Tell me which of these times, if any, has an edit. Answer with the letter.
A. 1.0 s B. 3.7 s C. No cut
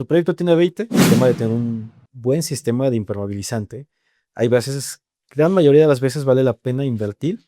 A